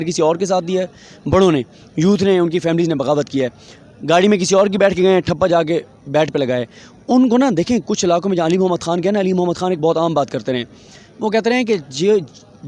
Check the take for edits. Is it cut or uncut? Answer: uncut